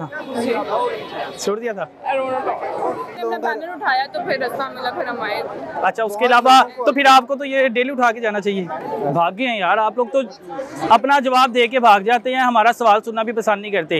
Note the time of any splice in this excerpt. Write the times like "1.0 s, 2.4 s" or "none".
3.2 s, 8.8 s